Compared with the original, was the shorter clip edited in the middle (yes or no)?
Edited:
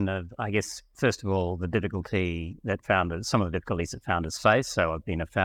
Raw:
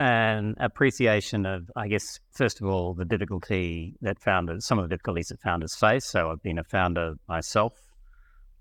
no